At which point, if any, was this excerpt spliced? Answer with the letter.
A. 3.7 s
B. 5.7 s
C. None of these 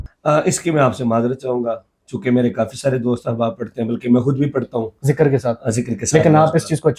C